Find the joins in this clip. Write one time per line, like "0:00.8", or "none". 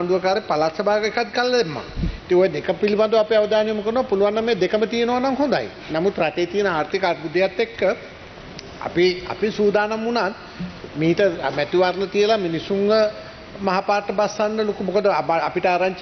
none